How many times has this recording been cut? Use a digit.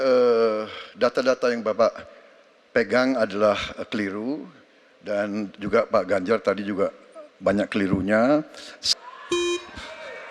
1